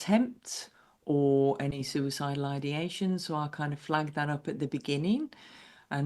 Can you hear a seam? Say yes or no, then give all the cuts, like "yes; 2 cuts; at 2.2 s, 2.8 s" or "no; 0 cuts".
no; 0 cuts